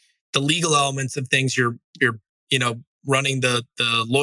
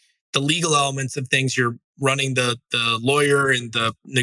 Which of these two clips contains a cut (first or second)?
second